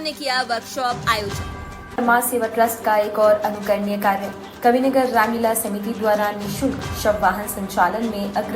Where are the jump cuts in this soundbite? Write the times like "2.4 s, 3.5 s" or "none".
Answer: 1.9 s

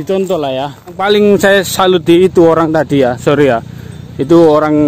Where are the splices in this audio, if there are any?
1.0 s

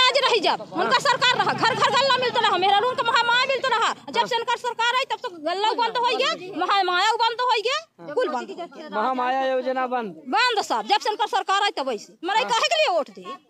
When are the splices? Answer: none

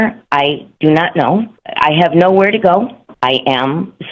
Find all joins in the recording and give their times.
1.6 s, 3.0 s

